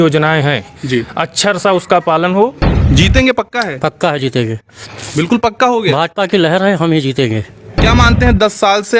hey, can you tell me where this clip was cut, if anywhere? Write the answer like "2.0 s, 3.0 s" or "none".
2.7 s, 7.7 s